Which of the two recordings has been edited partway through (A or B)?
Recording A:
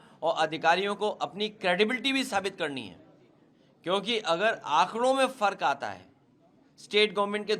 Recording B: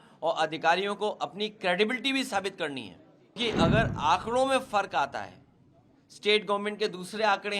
B